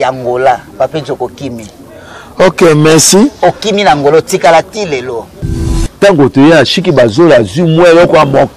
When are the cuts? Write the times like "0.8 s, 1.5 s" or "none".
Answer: 5.5 s